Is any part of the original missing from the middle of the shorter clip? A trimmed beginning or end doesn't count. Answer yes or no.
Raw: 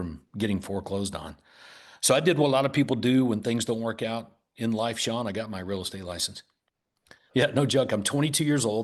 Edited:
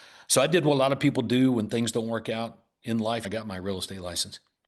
yes